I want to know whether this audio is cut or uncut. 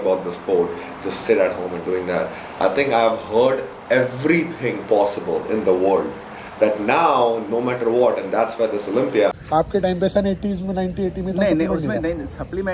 cut